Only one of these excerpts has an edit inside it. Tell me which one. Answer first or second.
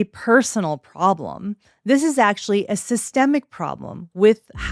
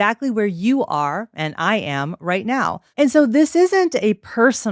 second